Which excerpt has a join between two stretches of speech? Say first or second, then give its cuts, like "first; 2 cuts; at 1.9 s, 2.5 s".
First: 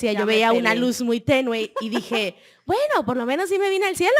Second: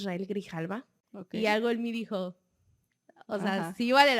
second; 1 cut; at 1.0 s